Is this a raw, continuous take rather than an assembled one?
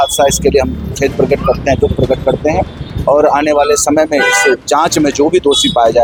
yes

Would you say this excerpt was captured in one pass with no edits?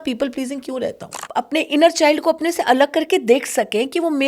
no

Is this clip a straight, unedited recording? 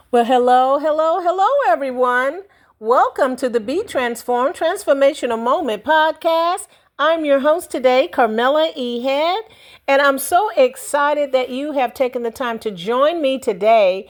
yes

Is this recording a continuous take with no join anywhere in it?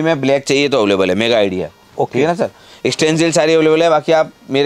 yes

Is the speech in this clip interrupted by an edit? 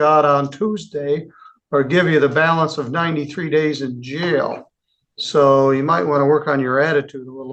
no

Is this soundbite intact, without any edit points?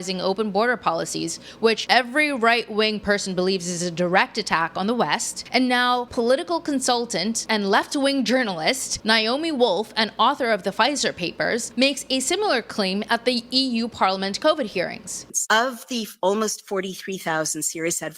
no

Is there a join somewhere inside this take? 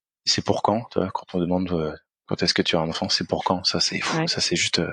no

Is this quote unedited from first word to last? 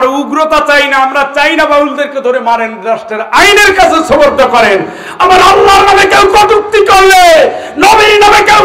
yes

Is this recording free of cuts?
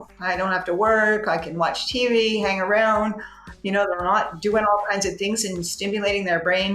yes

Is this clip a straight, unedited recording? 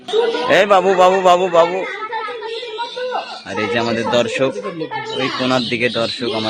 yes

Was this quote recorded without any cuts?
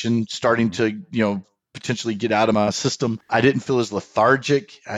no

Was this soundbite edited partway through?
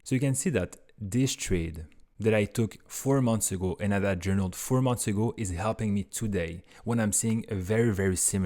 no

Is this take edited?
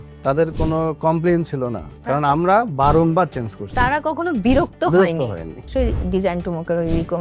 yes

